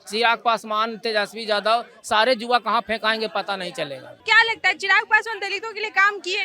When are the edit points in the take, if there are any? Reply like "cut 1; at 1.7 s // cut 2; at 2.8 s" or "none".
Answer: cut 1; at 4.2 s